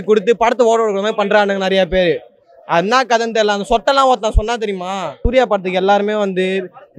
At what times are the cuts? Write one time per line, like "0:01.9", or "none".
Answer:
0:05.2